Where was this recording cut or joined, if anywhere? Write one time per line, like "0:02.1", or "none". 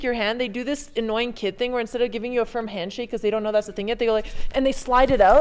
none

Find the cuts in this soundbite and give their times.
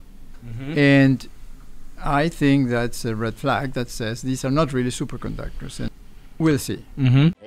0:05.9

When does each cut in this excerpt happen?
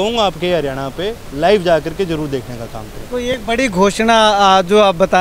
none

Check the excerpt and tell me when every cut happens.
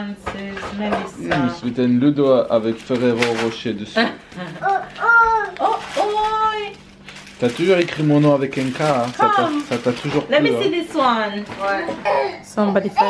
0:12.0

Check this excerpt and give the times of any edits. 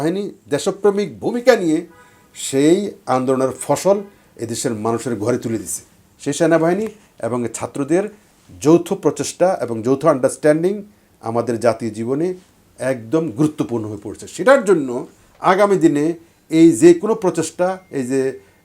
0:06.0

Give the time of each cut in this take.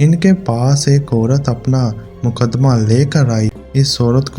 0:03.5

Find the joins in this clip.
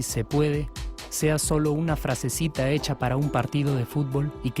none

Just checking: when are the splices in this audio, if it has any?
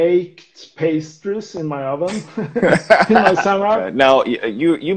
0:03.9

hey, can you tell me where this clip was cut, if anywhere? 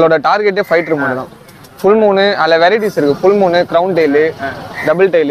none

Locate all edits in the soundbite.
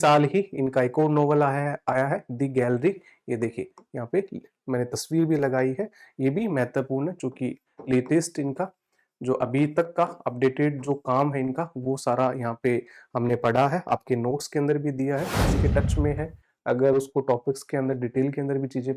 0:15.5

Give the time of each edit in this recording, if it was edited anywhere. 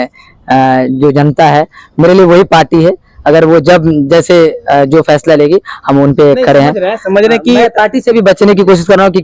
none

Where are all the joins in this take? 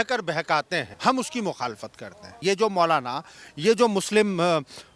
0:00.9
0:02.3

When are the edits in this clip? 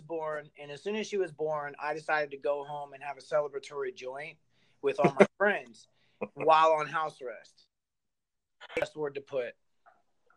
0:08.8

